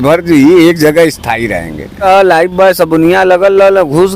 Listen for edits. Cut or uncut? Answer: cut